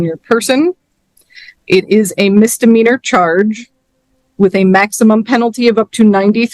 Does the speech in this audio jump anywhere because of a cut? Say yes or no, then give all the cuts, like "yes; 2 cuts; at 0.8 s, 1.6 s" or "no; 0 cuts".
no; 0 cuts